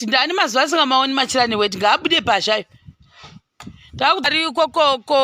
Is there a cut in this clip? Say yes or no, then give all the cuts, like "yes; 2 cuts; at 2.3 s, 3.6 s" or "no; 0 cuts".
yes; 1 cut; at 4.2 s